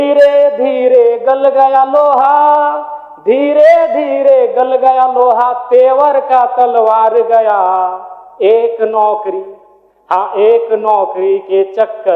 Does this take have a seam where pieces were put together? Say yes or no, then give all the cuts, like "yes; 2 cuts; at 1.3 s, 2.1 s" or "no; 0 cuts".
no; 0 cuts